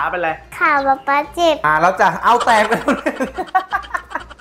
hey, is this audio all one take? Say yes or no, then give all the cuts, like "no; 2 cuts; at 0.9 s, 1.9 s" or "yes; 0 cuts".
no; 1 cut; at 1.6 s